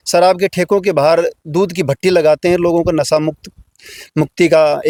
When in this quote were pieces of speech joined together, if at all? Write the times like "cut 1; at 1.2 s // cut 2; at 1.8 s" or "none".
none